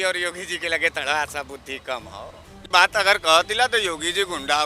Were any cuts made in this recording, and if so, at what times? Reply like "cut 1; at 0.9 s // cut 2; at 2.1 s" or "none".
cut 1; at 2.7 s